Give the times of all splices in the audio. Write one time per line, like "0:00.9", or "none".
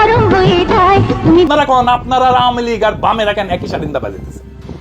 0:01.5